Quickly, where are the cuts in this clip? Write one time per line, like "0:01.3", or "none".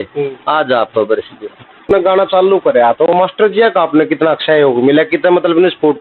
0:01.9